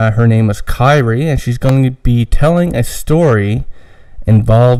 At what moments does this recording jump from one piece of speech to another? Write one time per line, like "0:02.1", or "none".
none

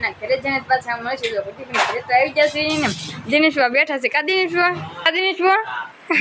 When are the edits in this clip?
0:05.1

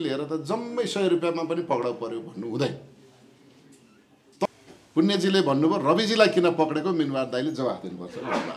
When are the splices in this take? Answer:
0:04.5

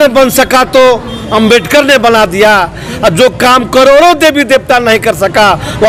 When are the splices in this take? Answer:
none

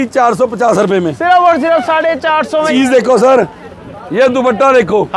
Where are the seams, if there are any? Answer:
0:02.7

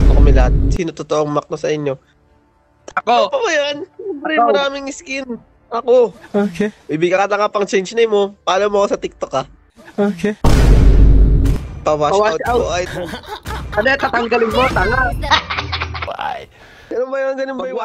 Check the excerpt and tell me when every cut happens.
0:10.4
0:16.0

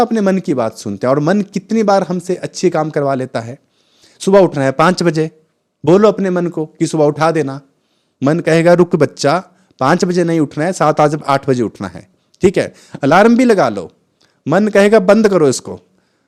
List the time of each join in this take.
none

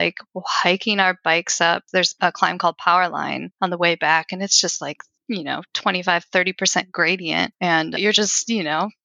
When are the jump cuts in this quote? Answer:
0:01.9
0:03.4
0:05.1
0:08.0

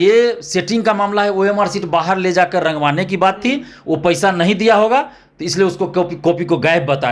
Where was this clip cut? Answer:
none

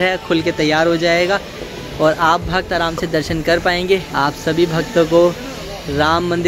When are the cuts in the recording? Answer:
0:04.1

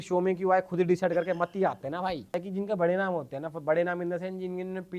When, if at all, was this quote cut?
0:02.4

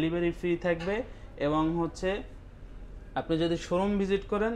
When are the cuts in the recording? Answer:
none

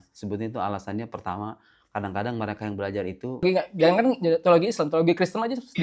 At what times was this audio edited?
0:03.7

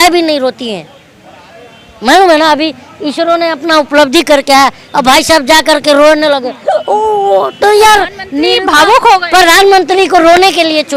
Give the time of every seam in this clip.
none

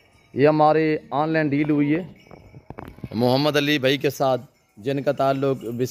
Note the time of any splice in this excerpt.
none

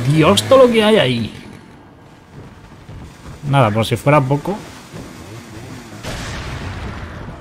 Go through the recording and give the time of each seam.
none

